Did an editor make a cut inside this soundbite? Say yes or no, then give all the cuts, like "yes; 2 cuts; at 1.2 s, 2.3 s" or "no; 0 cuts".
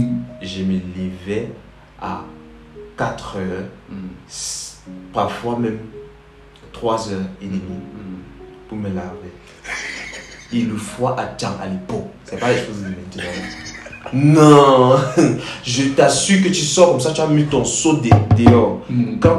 no; 0 cuts